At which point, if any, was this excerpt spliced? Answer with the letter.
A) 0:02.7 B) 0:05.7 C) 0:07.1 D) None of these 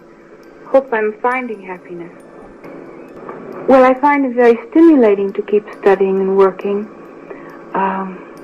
A